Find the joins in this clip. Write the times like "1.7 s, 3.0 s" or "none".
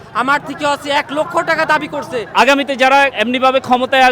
2.3 s, 3.1 s